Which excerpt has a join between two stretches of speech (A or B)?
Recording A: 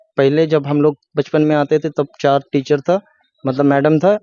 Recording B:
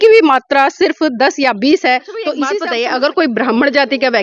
B